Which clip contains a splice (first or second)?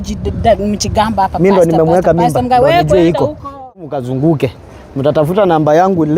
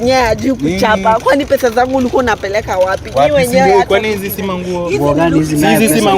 first